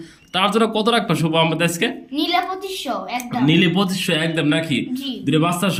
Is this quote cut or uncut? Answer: uncut